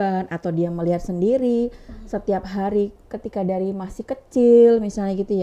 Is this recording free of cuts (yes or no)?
yes